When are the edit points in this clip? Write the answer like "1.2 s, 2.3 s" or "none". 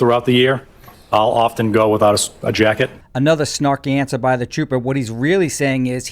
none